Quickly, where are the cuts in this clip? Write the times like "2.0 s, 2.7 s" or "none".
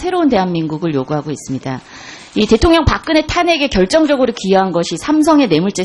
none